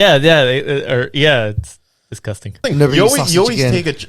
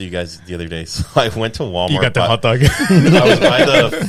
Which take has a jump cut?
first; 1 cut; at 2.6 s

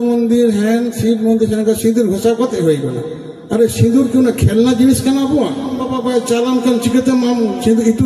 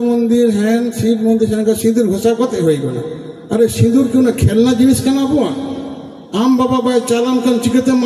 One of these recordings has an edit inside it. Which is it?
first; 1 cut; at 5.9 s

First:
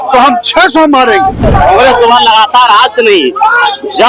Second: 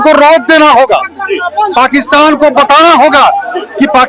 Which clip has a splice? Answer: first; 1 cut; at 1.5 s

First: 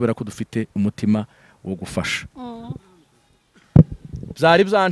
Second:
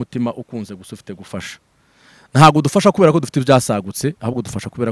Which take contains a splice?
first; 1 cut; at 2.3 s

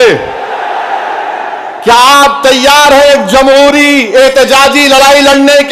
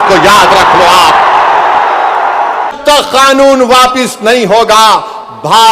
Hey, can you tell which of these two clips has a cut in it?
second; 1 cut; at 2.7 s

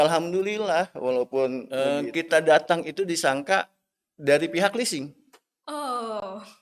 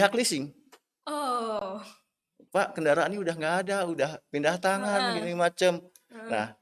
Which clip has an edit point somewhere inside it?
first; 1 cut; at 1.7 s

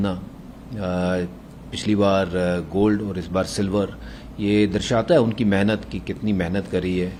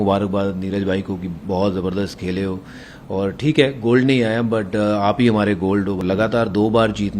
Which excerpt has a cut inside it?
second; 1 cut; at 6.0 s

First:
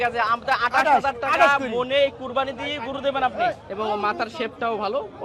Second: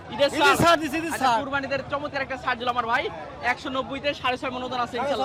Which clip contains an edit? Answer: first; 1 cut; at 3.7 s

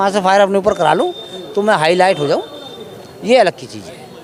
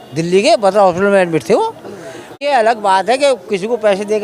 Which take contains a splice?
second; 1 cut; at 2.4 s

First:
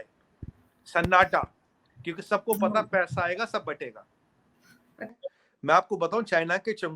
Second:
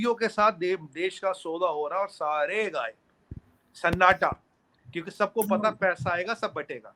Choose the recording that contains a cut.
first; 1 cut; at 5.1 s

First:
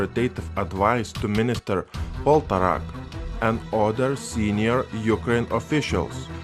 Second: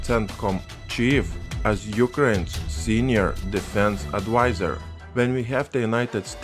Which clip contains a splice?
first; 1 cut; at 5.3 s

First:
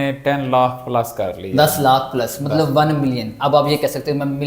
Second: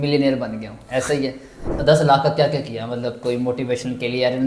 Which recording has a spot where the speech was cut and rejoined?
second; 1 cut; at 1.6 s

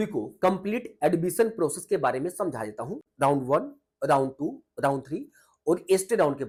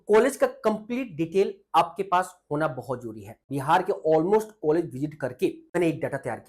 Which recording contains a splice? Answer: second; 2 cuts; at 3.5 s, 5.8 s

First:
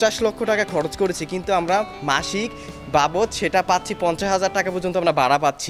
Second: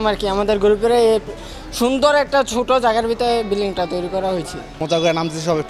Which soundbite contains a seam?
second; 1 cut; at 4.8 s

